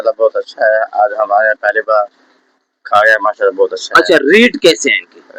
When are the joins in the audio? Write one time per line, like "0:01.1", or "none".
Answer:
none